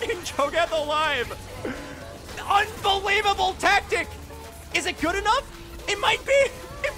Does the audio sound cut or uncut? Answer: uncut